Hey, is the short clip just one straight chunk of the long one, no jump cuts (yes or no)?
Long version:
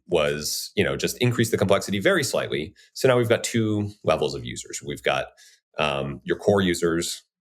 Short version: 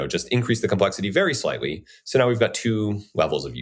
yes